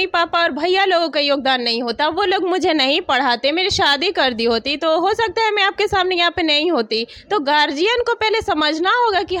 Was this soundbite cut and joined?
no; 0 cuts

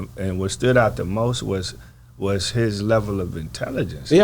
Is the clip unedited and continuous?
yes; 0 cuts

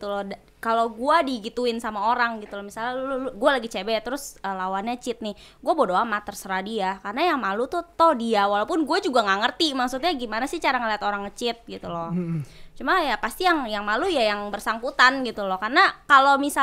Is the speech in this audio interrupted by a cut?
no; 0 cuts

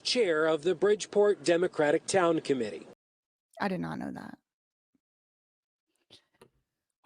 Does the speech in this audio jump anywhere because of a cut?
yes; 1 cut; at 2.9 s

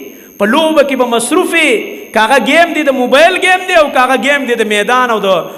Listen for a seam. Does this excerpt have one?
no; 0 cuts

